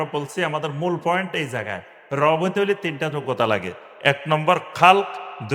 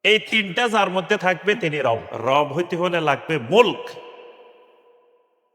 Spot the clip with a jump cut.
second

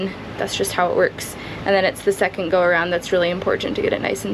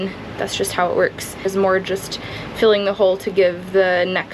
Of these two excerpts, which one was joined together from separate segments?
second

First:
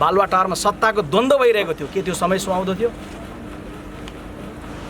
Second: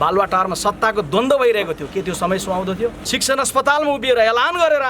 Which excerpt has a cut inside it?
second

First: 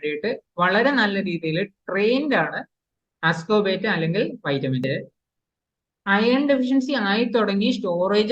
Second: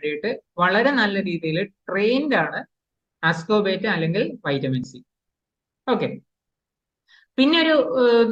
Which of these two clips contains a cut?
first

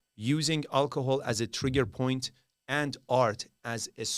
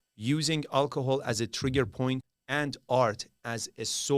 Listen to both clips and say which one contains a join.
second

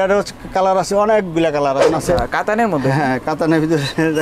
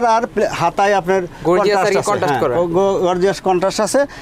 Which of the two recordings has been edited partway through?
first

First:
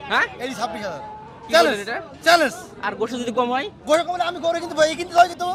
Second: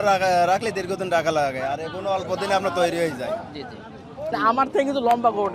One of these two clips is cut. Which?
second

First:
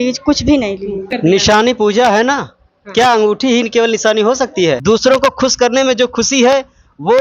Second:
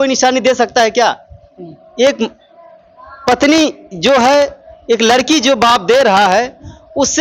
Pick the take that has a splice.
first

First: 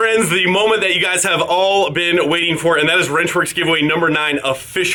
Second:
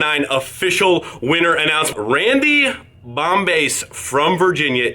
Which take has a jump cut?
second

